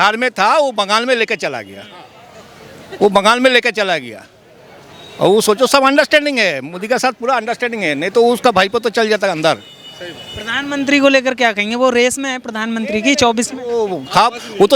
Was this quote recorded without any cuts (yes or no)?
yes